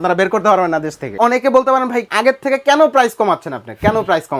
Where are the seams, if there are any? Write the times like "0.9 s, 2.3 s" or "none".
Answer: 1.1 s, 2.1 s